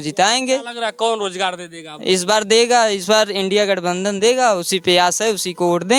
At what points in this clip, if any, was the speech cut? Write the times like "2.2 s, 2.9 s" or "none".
none